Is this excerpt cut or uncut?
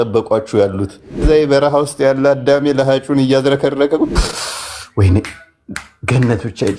cut